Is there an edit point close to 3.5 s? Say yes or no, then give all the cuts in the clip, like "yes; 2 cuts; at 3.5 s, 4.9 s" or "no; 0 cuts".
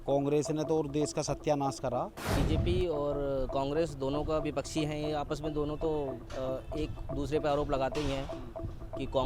no; 1 cut; at 2.2 s